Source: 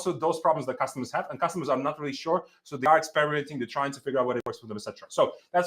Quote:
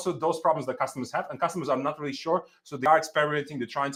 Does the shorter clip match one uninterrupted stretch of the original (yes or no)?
yes